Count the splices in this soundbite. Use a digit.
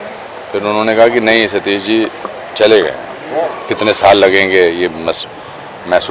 1